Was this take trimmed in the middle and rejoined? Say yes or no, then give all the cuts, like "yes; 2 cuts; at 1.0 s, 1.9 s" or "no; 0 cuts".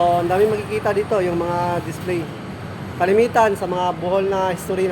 no; 0 cuts